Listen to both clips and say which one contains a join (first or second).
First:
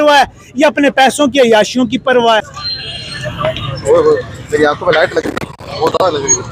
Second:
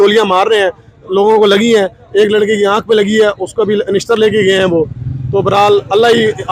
first